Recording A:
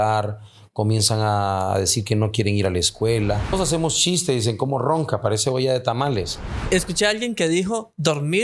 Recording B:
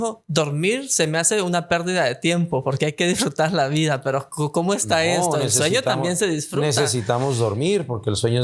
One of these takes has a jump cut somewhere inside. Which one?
A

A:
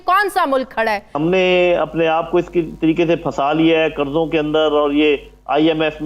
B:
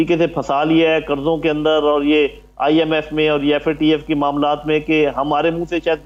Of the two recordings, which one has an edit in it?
A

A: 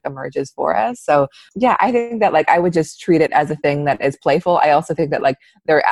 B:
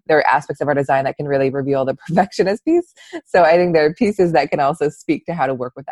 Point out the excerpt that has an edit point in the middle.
A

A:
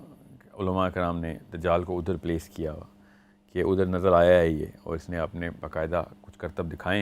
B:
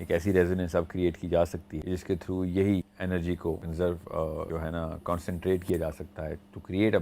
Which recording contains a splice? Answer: B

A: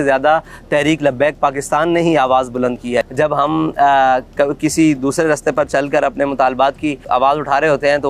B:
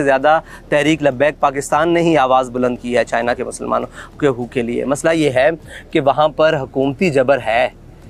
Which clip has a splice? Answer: A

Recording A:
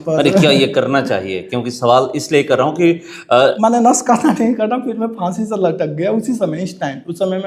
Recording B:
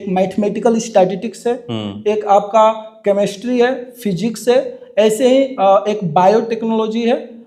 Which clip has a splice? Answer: A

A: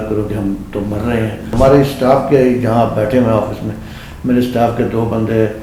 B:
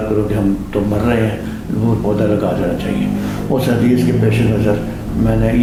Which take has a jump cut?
A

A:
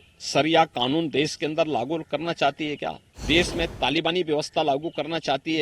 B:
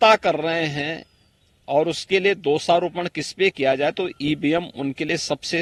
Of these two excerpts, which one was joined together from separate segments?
A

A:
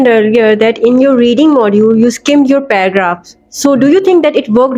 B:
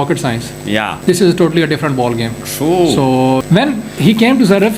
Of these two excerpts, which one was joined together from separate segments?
B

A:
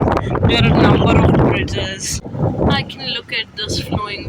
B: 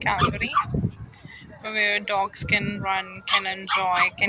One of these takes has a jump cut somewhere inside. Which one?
A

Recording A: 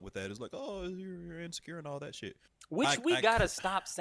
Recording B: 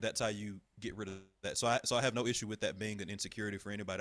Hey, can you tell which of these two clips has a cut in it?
A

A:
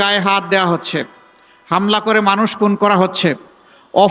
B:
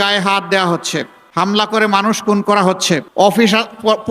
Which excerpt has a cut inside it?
B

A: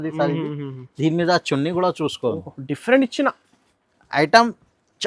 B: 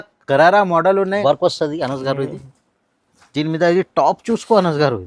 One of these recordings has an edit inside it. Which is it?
B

